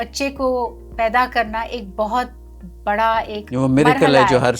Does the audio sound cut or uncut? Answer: cut